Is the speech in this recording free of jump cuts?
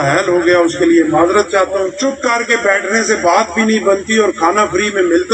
no; 1 cut; at 1.9 s

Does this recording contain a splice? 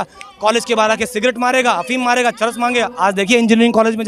no; 0 cuts

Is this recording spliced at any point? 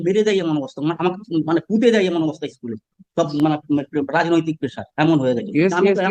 no; 0 cuts

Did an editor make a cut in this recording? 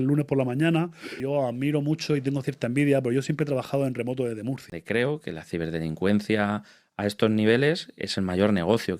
yes; 2 cuts; at 1.2 s, 4.7 s

